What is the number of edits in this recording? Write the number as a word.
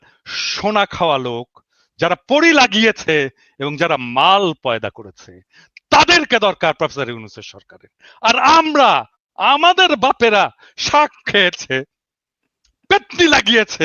zero